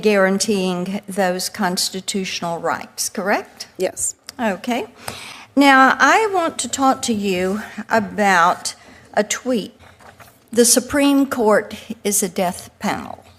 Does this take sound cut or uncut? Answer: cut